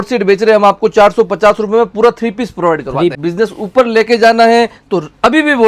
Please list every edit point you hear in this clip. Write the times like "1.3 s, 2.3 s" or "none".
3.1 s